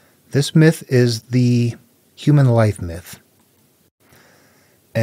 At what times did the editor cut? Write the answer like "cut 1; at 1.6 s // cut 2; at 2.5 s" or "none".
cut 1; at 3.7 s